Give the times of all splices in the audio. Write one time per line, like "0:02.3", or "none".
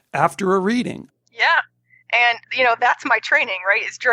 0:01.0

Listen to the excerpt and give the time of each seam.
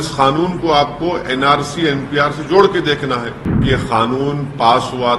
0:03.6

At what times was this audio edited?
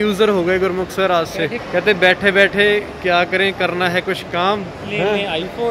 0:01.6
0:04.8

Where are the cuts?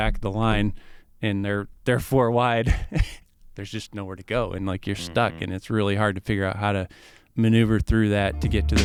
none

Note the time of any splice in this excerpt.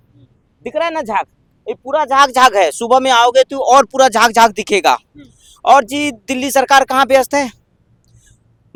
none

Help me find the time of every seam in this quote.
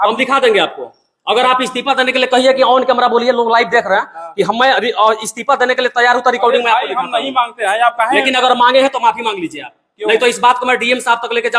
none

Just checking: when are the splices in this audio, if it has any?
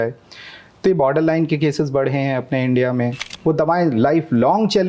0:03.3

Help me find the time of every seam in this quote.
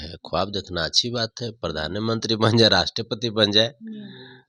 none

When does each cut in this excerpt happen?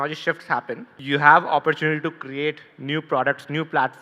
0:00.9

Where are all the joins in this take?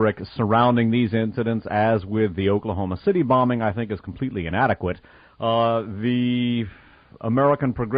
none

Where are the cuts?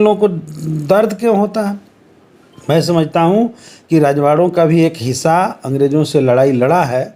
none

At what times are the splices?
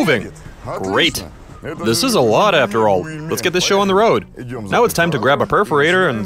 0:01.8
0:04.6

